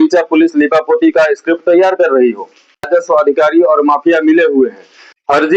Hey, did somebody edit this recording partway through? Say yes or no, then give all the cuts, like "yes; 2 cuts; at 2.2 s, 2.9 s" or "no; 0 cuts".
yes; 1 cut; at 2.9 s